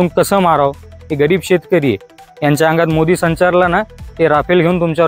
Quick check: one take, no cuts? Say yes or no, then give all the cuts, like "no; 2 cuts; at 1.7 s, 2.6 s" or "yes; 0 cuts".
no; 1 cut; at 1.0 s